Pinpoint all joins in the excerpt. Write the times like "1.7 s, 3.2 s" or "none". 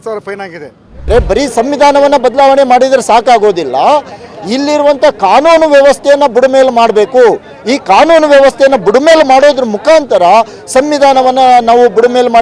1.0 s